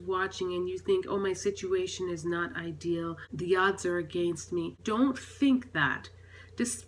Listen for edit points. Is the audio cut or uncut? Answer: cut